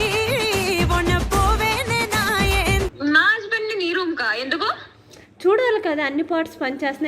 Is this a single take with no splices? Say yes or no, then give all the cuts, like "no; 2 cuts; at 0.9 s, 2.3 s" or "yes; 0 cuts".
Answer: no; 1 cut; at 2.9 s